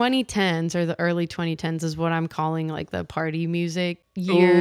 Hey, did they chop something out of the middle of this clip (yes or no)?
no